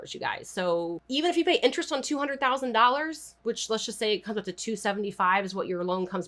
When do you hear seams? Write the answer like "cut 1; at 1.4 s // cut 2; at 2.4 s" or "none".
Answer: cut 1; at 1.0 s // cut 2; at 3.2 s